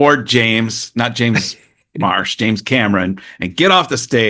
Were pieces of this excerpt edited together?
no; 0 cuts

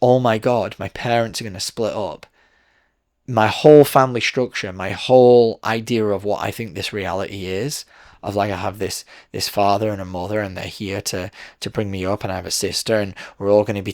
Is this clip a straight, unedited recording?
no; 1 cut; at 3.0 s

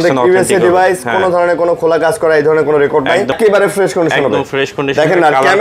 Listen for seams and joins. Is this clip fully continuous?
no; 1 cut; at 3.3 s

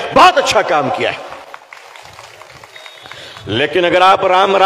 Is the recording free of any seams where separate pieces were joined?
no; 1 cut; at 1.7 s

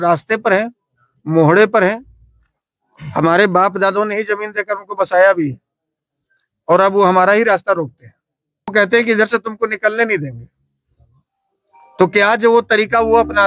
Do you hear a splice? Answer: yes; 1 cut; at 8.7 s

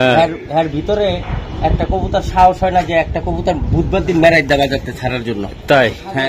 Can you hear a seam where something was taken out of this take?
no; 0 cuts

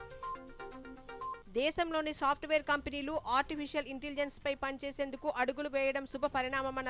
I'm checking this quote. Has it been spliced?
yes; 1 cut; at 0.9 s

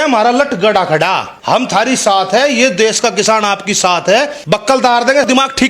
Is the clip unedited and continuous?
no; 2 cuts; at 1.3 s, 4.4 s

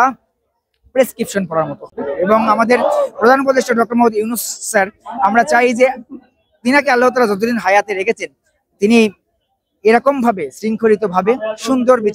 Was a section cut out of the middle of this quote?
yes; 1 cut; at 1.9 s

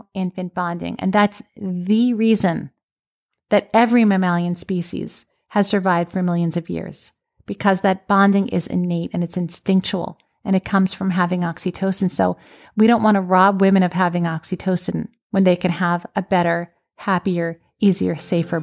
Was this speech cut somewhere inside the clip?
no; 0 cuts

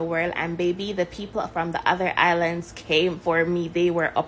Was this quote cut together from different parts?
no; 0 cuts

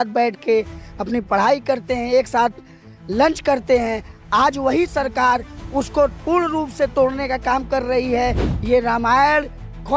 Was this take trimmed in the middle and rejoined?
yes; 1 cut; at 8.4 s

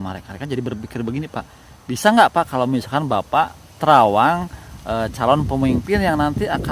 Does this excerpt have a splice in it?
no; 0 cuts

